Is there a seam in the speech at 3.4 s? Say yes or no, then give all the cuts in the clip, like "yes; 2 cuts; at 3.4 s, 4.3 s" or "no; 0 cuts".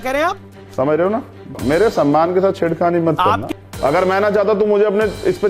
yes; 2 cuts; at 1.6 s, 3.4 s